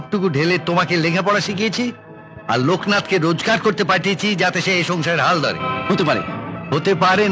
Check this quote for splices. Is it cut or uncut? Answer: uncut